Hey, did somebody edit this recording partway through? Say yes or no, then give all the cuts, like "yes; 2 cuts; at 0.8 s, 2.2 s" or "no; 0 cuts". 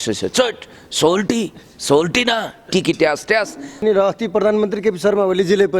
yes; 1 cut; at 3.8 s